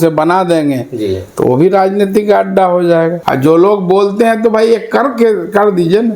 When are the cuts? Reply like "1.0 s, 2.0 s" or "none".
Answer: 3.2 s